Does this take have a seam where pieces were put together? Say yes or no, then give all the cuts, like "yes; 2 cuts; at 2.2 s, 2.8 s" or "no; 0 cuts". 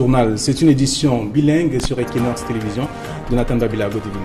no; 0 cuts